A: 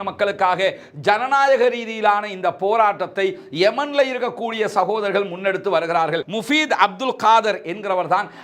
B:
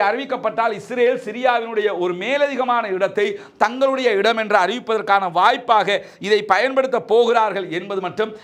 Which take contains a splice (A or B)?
A